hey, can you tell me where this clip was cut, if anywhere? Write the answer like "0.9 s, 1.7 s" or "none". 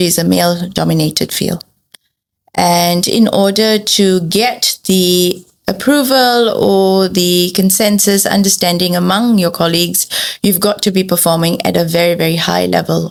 none